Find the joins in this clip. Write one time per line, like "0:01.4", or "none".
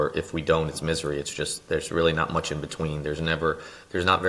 none

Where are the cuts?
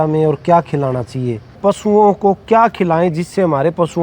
0:01.6

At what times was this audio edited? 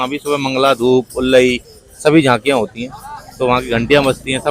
none

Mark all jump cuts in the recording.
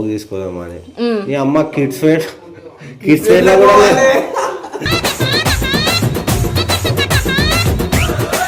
none

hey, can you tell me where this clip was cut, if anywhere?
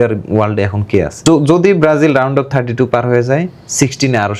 0:01.2

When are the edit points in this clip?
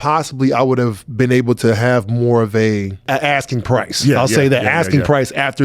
0:03.0

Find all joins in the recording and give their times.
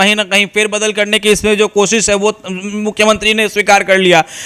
none

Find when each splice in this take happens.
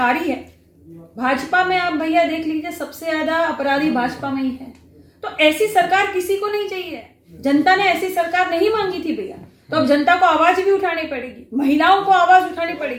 none

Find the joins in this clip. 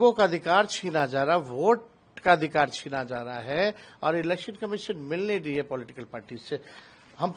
none

